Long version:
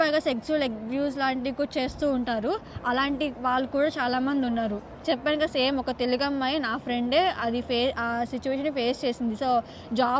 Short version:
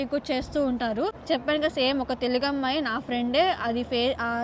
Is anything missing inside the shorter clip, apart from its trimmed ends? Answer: yes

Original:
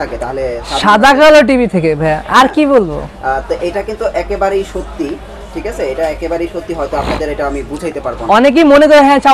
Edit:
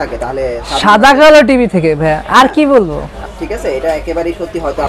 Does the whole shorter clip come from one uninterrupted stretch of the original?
no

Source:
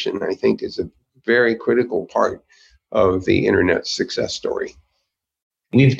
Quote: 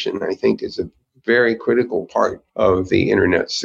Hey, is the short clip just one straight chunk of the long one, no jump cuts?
no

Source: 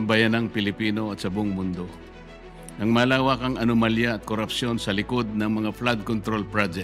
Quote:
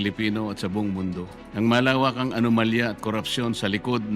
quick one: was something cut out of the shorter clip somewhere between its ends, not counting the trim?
yes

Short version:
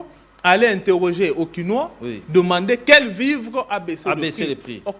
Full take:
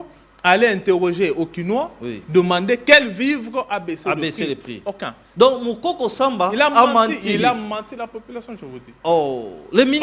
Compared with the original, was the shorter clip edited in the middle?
no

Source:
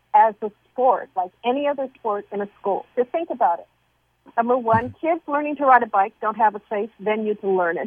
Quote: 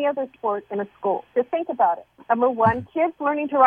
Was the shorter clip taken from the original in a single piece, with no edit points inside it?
no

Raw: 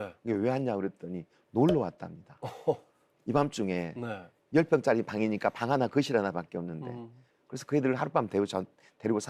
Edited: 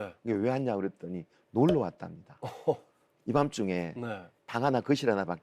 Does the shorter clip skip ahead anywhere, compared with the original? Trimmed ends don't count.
yes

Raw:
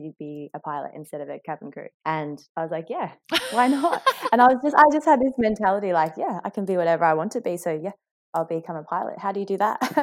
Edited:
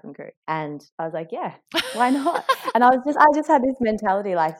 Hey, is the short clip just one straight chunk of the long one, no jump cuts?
yes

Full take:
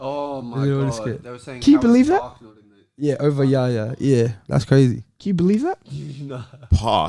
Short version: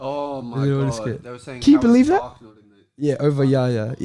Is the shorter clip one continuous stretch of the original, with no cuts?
yes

